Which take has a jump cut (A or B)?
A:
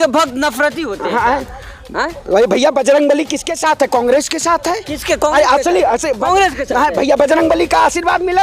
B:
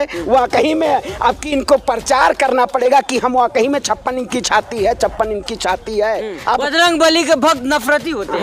B